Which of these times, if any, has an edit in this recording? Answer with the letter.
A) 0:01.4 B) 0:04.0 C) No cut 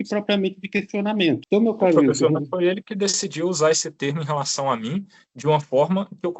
A